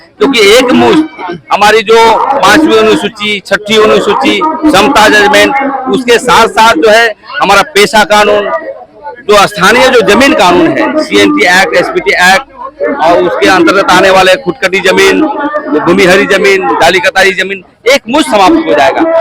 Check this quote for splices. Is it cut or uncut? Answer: uncut